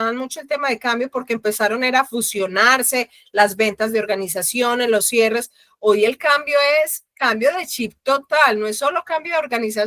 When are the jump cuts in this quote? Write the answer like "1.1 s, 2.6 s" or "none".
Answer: none